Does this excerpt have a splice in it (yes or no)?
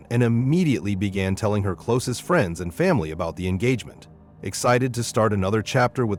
no